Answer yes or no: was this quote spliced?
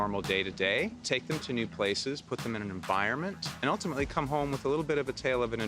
yes